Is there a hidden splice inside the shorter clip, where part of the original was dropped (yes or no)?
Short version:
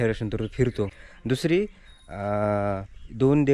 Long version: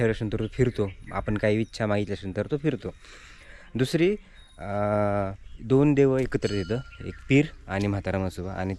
yes